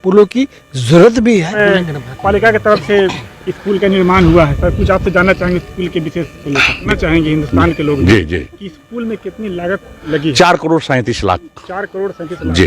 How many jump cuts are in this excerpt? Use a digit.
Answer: 2